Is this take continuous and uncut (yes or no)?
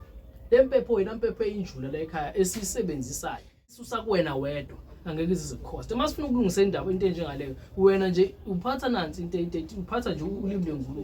no